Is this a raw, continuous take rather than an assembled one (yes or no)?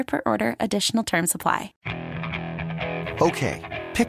no